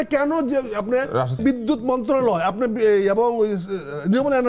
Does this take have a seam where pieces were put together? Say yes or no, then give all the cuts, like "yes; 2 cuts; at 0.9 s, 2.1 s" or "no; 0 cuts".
yes; 1 cut; at 1.4 s